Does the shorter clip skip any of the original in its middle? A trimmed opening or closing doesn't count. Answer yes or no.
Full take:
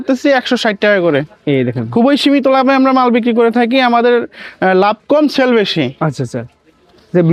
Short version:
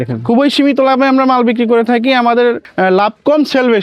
yes